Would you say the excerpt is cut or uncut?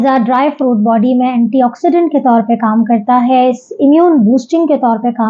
uncut